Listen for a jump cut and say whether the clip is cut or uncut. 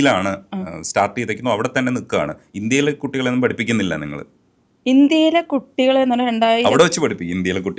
uncut